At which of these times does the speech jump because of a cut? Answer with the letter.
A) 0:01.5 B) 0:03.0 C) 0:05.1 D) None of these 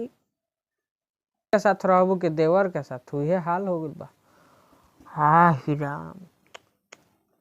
A